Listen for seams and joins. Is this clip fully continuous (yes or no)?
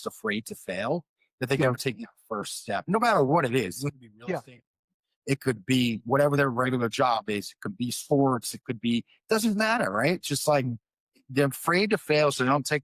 yes